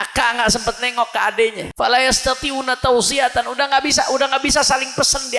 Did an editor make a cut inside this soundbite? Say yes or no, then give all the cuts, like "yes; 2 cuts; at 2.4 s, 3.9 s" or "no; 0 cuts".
yes; 1 cut; at 1.6 s